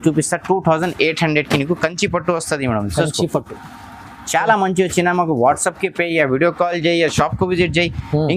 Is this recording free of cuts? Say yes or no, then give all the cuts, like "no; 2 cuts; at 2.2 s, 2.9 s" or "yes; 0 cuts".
yes; 0 cuts